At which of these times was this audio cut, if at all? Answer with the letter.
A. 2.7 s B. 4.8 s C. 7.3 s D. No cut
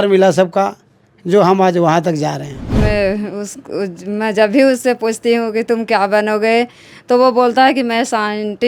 A